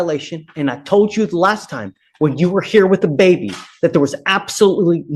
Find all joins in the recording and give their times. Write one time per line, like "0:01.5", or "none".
none